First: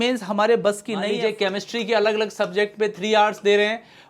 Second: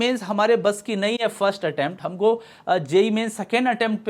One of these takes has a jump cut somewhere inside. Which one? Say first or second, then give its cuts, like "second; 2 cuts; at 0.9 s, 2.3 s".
first; 1 cut; at 1.1 s